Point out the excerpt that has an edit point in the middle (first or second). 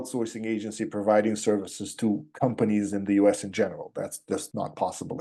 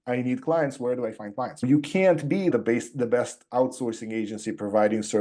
second